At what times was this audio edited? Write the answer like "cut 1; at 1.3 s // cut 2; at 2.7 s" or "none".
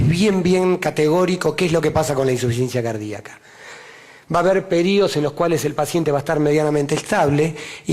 cut 1; at 4.9 s